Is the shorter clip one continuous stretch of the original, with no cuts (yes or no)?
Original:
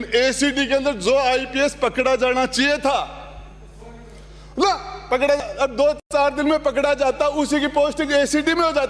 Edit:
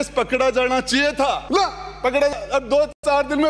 no